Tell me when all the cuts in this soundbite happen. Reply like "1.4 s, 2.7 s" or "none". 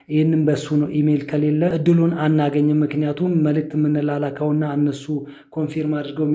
1.7 s